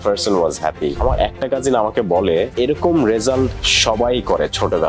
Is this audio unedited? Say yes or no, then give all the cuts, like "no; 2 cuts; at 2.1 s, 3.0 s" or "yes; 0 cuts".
no; 2 cuts; at 1.0 s, 2.5 s